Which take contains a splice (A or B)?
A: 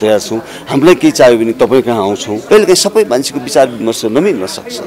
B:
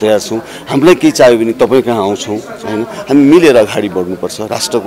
A